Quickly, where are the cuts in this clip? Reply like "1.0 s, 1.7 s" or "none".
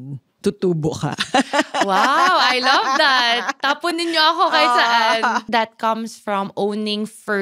5.5 s